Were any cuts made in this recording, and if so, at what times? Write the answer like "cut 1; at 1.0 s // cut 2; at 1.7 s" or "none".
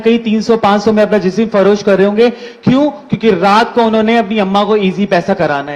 none